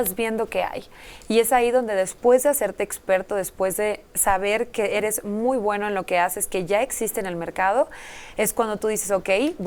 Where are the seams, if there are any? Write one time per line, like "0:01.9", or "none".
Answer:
none

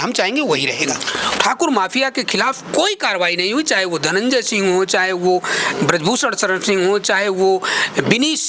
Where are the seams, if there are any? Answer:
0:01.3

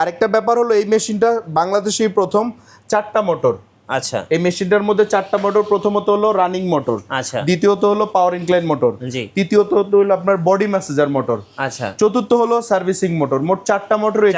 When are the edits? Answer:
none

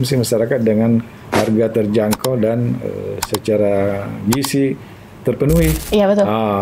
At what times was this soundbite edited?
0:01.2

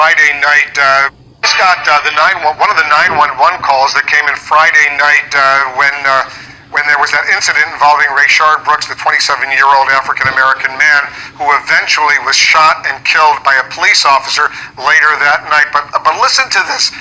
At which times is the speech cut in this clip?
0:01.3

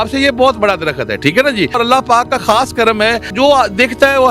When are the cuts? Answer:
0:01.8
0:03.3

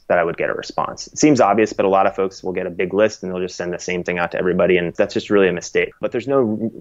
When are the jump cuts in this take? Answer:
0:04.9
0:06.0

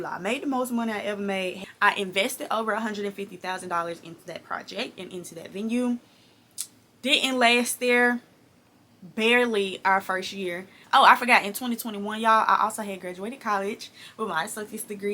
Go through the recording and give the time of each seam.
0:01.6
0:10.7

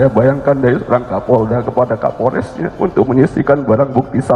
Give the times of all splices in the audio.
none

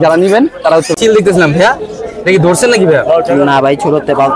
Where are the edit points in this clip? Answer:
0:00.9

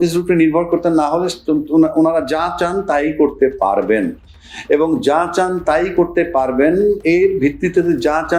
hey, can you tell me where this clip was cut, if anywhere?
none

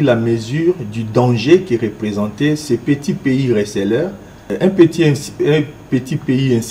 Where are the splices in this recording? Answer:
0:04.4

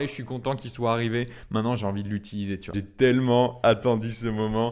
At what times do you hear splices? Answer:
0:02.8

